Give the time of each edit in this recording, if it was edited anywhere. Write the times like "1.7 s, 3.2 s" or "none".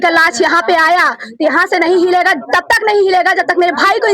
none